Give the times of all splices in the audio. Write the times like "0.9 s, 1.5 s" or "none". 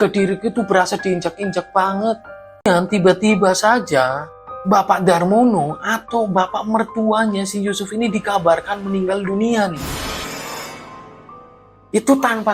2.7 s